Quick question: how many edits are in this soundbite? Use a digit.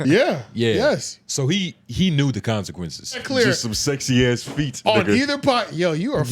1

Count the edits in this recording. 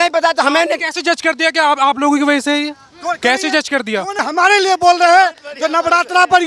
1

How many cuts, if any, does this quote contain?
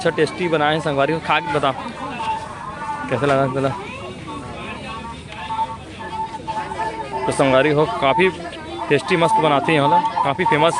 0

